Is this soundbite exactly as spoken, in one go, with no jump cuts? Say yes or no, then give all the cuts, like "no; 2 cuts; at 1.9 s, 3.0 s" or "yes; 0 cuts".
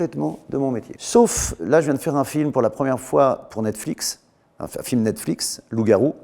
no; 1 cut; at 0.9 s